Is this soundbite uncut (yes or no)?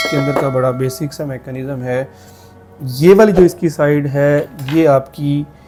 yes